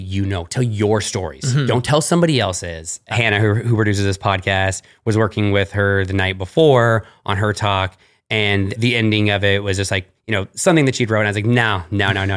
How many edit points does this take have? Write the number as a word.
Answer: two